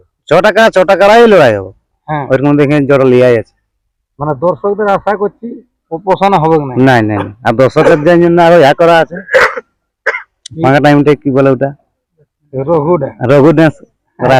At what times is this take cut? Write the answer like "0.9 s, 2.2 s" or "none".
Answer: none